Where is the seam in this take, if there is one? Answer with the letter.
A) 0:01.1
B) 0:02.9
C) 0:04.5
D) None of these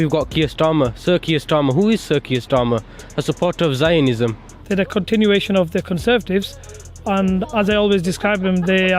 C